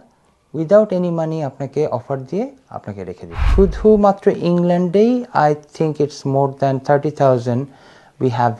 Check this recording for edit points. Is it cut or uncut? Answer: cut